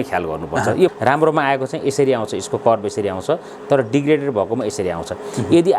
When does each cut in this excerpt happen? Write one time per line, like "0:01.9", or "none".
0:00.9